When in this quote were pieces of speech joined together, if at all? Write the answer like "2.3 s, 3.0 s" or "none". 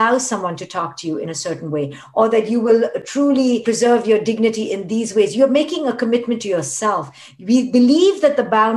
2.0 s